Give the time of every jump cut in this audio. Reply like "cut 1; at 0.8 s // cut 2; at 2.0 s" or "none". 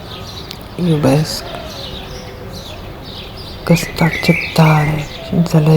cut 1; at 1.8 s // cut 2; at 3.6 s